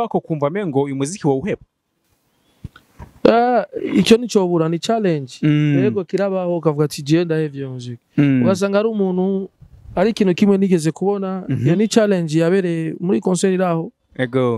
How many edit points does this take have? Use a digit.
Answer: 0